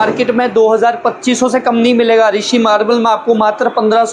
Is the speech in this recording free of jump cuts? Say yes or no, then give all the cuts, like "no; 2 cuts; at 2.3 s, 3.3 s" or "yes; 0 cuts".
yes; 0 cuts